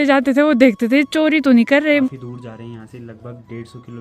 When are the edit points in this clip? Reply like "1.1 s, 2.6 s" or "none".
2.1 s